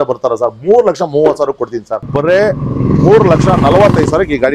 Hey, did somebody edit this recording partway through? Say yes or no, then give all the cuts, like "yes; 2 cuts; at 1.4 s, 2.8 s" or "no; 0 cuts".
yes; 1 cut; at 2.1 s